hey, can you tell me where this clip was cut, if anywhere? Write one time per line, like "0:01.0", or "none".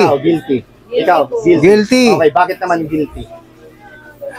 none